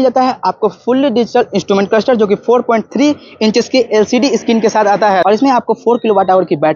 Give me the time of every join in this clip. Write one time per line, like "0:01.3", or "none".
0:05.2